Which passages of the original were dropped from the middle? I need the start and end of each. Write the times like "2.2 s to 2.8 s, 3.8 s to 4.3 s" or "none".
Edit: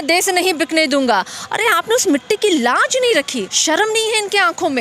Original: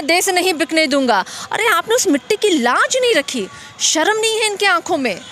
3.5 s to 3.7 s